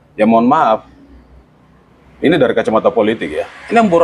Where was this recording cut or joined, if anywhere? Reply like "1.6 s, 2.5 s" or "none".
none